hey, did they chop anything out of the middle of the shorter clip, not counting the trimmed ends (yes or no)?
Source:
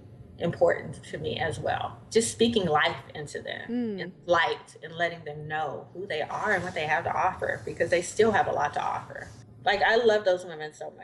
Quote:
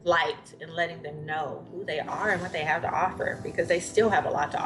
no